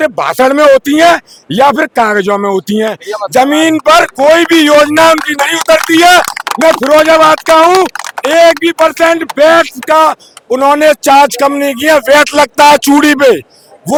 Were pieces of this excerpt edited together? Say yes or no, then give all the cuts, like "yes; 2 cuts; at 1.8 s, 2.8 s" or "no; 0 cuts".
no; 0 cuts